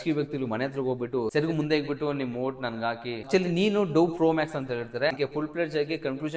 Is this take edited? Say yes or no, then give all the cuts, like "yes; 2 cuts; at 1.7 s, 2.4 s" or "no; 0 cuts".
yes; 2 cuts; at 1.3 s, 3.1 s